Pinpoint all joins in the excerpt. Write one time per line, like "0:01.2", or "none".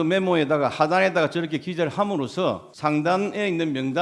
0:02.7